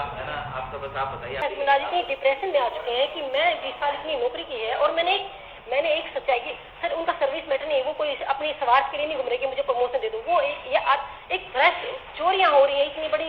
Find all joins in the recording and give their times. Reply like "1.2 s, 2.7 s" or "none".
1.4 s